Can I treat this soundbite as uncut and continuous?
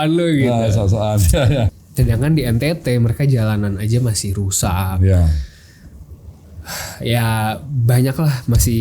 no; 1 cut; at 1.7 s

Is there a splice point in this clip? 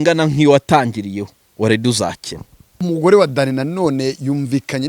yes; 1 cut; at 2.8 s

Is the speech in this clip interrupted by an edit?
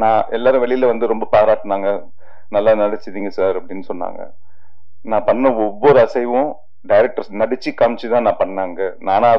no; 0 cuts

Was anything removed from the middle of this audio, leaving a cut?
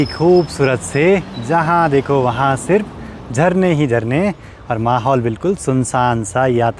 no; 0 cuts

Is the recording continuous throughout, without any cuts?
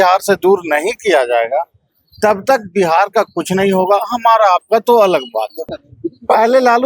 no; 1 cut; at 5.7 s

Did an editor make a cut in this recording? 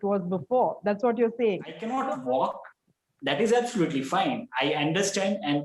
yes; 1 cut; at 1.8 s

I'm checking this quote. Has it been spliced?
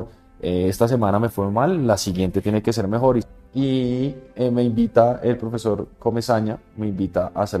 yes; 1 cut; at 3.3 s

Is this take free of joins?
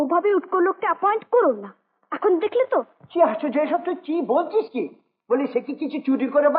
yes; 0 cuts

